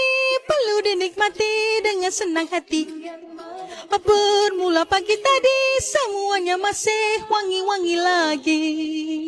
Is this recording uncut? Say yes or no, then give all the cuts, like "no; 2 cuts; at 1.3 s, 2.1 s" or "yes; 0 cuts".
yes; 0 cuts